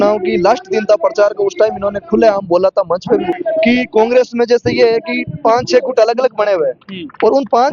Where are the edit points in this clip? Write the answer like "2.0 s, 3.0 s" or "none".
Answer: 3.3 s